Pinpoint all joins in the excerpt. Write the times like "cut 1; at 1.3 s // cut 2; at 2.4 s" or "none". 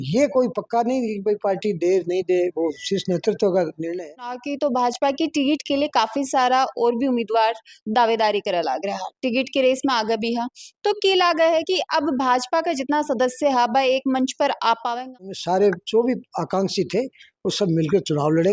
cut 1; at 4.5 s // cut 2; at 15.4 s